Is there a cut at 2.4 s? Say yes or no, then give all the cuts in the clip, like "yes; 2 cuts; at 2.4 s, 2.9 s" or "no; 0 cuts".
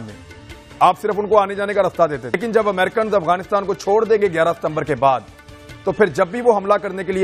yes; 1 cut; at 2.4 s